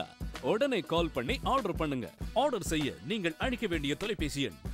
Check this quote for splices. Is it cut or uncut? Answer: cut